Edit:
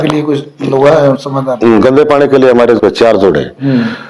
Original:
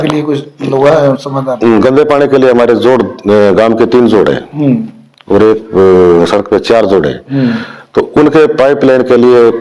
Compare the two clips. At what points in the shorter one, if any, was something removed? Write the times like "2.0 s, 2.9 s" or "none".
2.8 s